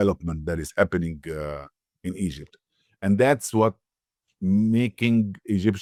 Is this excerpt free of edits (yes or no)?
yes